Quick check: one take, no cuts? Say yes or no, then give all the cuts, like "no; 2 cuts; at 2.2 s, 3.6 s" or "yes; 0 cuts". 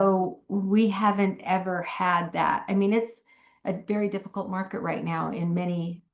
yes; 0 cuts